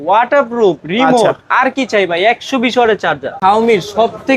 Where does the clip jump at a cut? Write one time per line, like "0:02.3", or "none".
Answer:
0:03.3